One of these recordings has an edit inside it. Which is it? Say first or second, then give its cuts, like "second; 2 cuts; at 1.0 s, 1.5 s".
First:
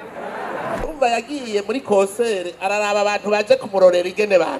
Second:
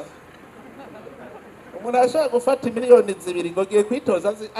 first; 1 cut; at 0.9 s